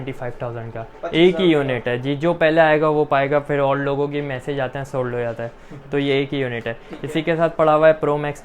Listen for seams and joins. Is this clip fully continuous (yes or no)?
yes